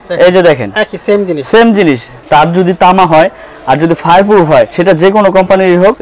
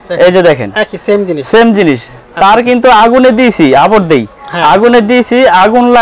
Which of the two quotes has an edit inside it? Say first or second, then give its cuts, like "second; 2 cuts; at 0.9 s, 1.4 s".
first; 2 cuts; at 2.1 s, 4.7 s